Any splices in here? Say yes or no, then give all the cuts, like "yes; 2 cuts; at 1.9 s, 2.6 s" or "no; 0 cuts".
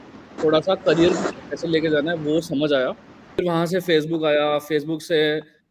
yes; 1 cut; at 3.4 s